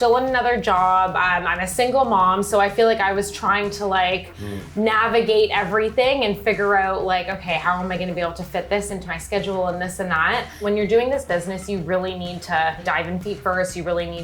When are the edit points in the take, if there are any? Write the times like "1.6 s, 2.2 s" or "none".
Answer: 10.6 s, 12.8 s